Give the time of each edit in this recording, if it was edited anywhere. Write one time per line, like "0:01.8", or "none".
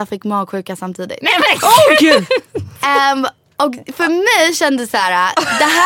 none

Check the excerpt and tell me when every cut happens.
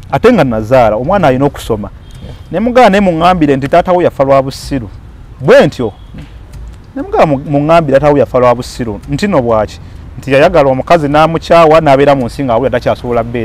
none

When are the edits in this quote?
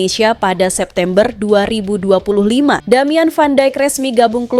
0:02.8

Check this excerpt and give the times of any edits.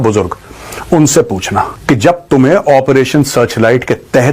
0:01.7

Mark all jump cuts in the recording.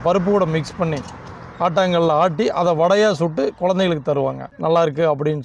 0:04.4

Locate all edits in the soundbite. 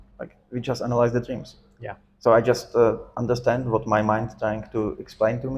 none

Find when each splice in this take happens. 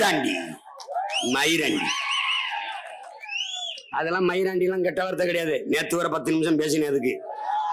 none

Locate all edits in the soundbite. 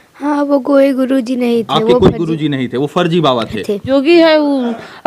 0:03.9

